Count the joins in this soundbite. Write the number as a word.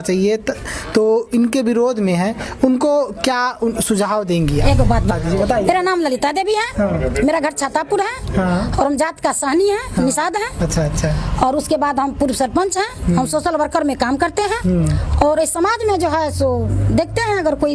one